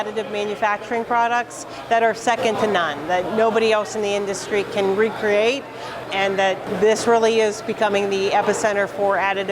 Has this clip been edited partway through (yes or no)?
yes